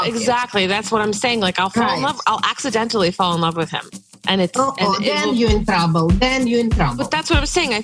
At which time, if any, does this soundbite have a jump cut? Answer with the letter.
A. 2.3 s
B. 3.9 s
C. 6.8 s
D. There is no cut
D